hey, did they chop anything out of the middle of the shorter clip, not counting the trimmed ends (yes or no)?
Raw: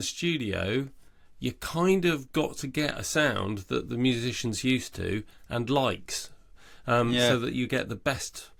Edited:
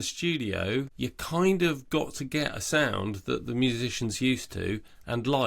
yes